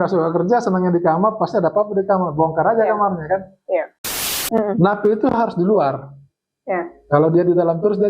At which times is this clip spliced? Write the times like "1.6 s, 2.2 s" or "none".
4.2 s